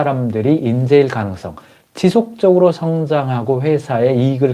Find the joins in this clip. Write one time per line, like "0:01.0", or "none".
none